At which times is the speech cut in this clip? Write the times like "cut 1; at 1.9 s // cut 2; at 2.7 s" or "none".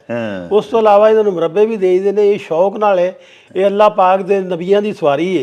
none